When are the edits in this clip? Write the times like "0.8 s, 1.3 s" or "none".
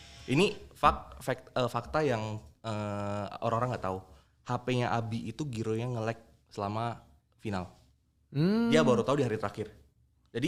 none